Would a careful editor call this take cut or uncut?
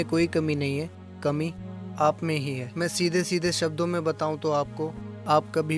uncut